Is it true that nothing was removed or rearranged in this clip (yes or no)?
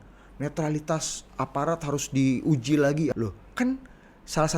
no